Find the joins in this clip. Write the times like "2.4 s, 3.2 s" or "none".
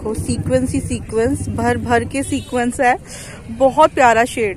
none